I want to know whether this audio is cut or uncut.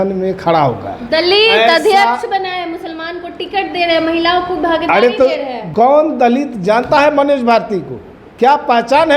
cut